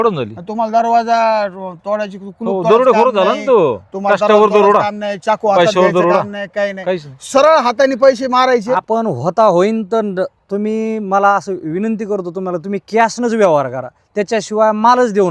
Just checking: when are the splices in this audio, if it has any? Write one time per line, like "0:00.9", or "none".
0:08.8